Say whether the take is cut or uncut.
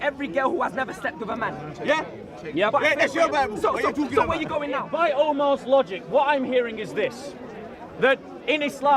cut